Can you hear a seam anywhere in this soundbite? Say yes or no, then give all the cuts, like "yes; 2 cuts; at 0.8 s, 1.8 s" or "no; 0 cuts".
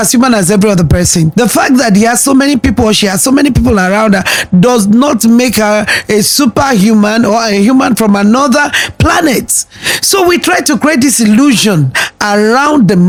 no; 0 cuts